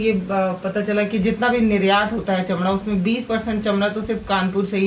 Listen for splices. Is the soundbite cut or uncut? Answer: uncut